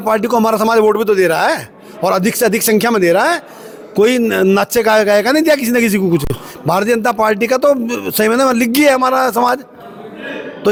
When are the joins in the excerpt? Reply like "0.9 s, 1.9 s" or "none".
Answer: none